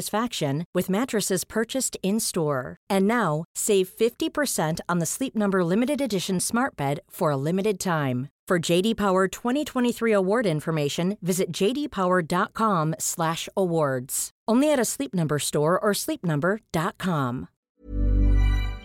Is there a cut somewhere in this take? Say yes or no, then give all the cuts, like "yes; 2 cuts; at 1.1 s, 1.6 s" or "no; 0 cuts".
yes; 1 cut; at 17.6 s